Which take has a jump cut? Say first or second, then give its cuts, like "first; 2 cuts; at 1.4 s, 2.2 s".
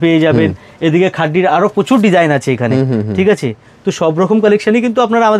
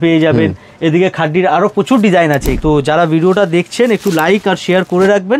second; 1 cut; at 2.5 s